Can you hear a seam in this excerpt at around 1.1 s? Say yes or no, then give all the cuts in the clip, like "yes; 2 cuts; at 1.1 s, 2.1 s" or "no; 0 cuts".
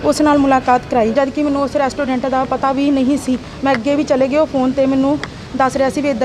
yes; 1 cut; at 1.1 s